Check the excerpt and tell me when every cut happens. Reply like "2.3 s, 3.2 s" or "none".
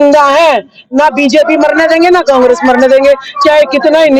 none